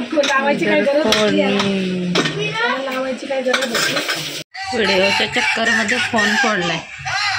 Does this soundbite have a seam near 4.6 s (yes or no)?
yes